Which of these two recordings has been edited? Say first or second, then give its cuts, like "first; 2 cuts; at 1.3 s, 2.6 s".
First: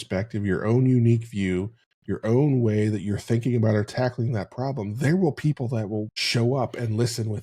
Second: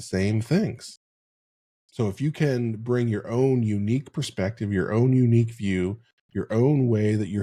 first; 1 cut; at 6.2 s